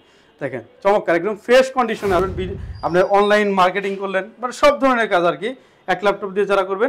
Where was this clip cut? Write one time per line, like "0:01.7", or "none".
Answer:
0:02.2